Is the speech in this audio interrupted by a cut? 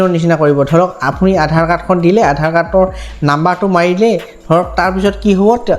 no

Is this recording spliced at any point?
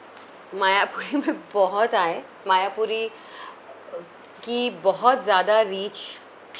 no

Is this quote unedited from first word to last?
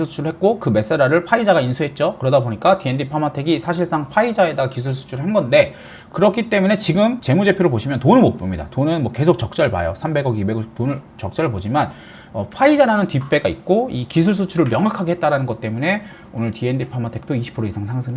yes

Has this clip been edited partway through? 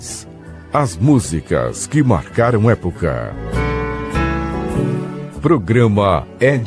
yes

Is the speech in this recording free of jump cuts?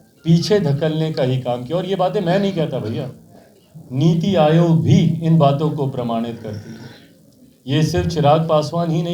yes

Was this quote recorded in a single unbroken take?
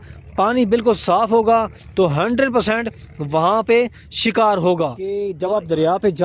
no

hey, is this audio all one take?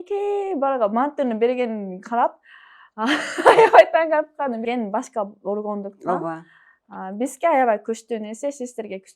no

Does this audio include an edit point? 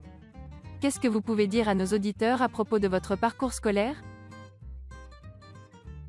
yes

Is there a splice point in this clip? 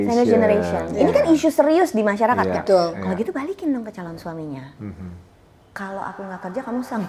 no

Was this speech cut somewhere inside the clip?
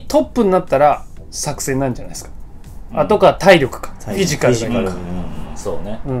no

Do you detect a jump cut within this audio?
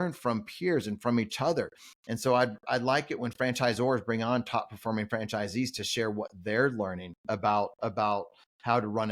no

